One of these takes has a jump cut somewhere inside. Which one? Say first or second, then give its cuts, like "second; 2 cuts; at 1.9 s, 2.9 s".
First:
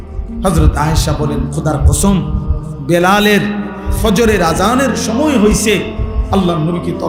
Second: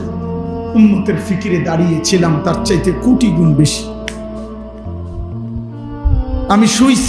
second; 2 cuts; at 3.7 s, 5.4 s